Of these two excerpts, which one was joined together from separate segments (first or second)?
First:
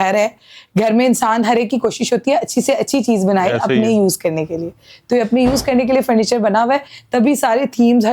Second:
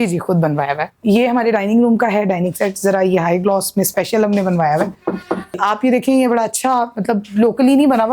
second